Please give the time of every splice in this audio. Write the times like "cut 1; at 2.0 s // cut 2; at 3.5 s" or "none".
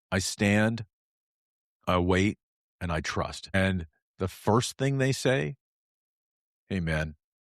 cut 1; at 3.5 s